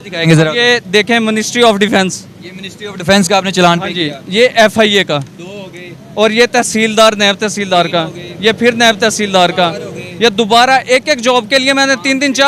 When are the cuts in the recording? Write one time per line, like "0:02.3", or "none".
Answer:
none